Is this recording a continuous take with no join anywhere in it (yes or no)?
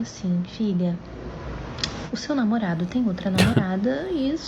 yes